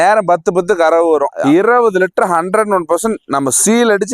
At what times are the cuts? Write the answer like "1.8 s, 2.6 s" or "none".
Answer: 1.3 s